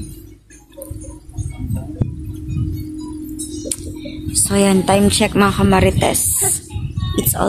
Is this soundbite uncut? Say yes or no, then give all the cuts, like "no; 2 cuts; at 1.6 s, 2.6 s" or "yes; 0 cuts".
yes; 0 cuts